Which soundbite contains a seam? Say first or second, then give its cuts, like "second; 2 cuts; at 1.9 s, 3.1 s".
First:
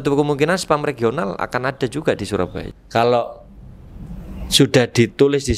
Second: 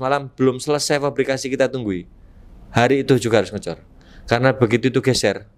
first; 1 cut; at 2.6 s